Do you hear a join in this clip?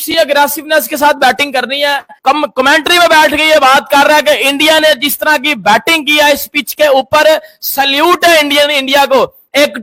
no; 0 cuts

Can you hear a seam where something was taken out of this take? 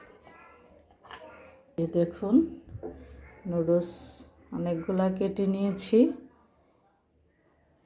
yes; 1 cut; at 1.7 s

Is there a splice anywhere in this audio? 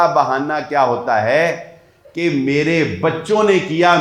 no; 0 cuts

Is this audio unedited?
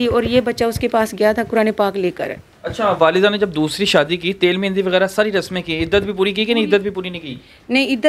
yes; 0 cuts

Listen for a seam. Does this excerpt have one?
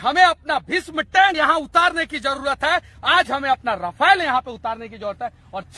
yes; 1 cut; at 1.3 s

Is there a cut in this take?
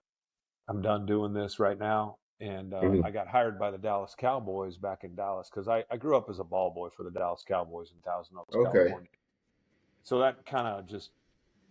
no; 0 cuts

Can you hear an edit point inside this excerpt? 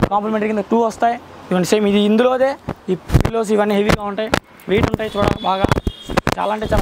no; 0 cuts

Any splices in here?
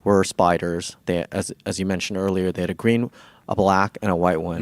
no; 0 cuts

